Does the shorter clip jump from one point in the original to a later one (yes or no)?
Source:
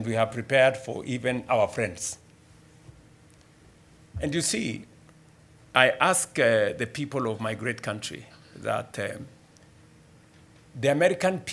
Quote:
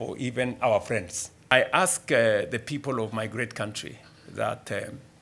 yes